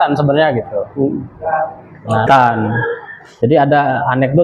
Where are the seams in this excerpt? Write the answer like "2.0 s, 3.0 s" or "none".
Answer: 2.3 s